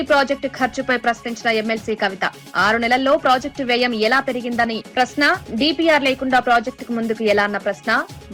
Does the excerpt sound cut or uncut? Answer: uncut